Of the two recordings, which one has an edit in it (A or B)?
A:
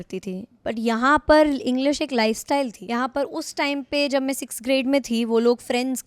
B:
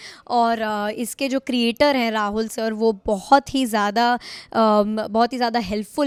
A